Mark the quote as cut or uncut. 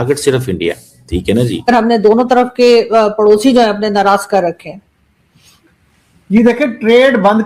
cut